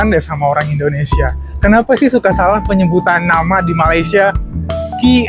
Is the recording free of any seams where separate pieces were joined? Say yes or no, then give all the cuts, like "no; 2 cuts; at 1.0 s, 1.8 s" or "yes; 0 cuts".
yes; 0 cuts